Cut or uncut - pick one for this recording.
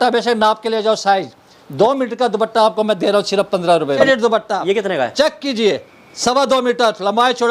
cut